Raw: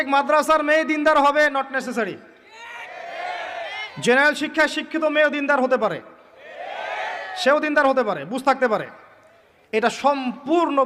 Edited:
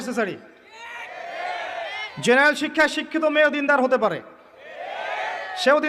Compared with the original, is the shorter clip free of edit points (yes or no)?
yes